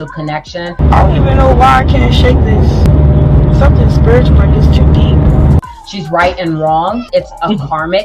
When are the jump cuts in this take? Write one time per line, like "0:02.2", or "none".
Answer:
0:00.8
0:02.8
0:05.6
0:07.1